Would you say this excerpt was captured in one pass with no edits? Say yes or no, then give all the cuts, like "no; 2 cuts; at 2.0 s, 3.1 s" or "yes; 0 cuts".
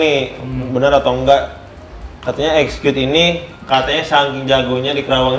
yes; 0 cuts